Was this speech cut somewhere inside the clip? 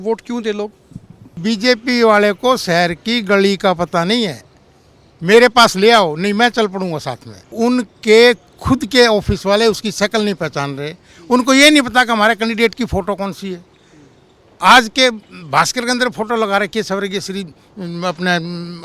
yes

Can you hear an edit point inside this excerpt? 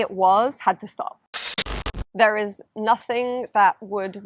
yes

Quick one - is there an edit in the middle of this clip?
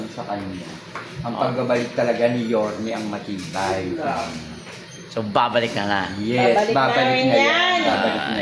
no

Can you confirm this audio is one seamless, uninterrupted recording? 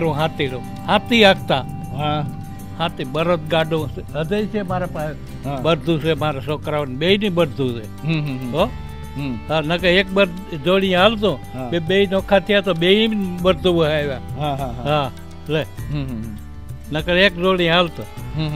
yes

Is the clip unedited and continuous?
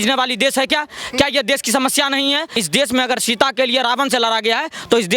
no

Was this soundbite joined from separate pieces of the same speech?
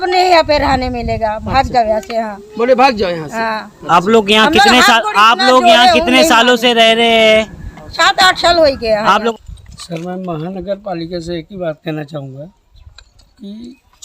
yes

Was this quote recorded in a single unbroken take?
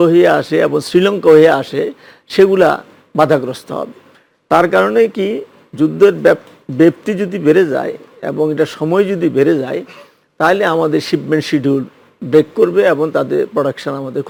yes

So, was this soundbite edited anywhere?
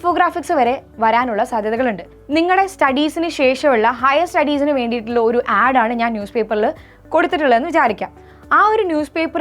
yes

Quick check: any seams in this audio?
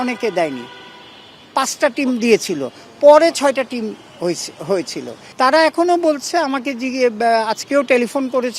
yes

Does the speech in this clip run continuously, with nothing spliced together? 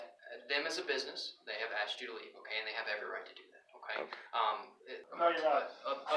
no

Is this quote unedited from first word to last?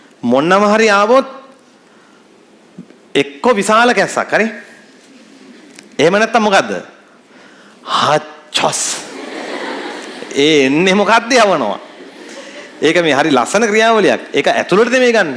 yes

